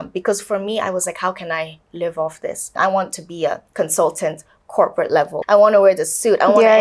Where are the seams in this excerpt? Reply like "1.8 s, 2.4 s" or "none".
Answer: 2.7 s, 3.6 s, 5.4 s